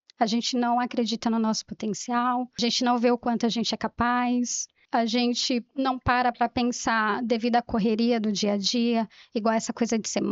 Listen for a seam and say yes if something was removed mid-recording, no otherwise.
yes